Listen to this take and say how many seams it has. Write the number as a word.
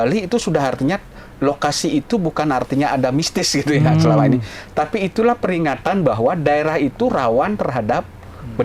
zero